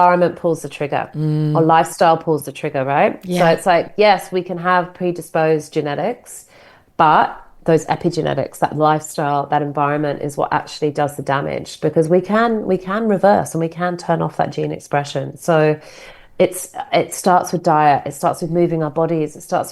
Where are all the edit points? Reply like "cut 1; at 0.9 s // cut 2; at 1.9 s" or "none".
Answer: none